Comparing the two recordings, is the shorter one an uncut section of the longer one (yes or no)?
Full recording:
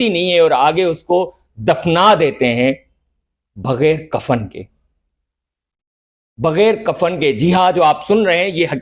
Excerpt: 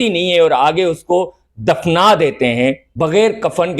no